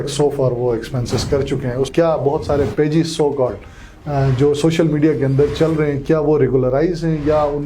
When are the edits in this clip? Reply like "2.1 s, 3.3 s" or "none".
1.9 s